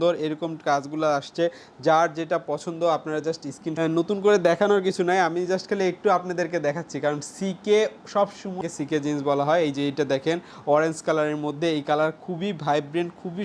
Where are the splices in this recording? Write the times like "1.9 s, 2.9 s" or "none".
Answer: 3.6 s, 8.6 s